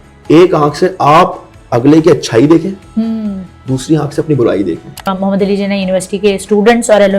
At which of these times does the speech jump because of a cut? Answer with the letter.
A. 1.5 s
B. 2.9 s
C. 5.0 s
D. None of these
C